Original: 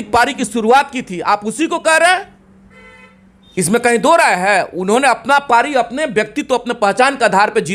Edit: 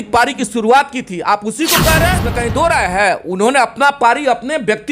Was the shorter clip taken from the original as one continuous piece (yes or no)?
no